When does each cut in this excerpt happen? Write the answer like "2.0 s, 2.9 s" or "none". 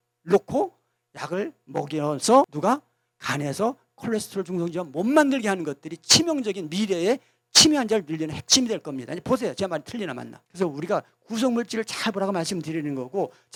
none